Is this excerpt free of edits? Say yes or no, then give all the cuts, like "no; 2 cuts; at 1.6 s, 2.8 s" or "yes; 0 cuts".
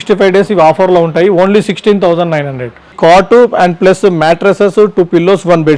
no; 1 cut; at 2.9 s